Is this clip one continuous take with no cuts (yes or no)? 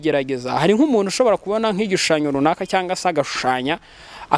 yes